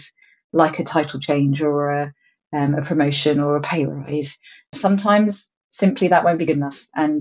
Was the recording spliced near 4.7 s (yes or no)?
yes